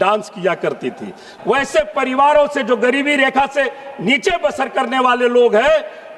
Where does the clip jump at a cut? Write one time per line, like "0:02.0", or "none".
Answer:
0:01.2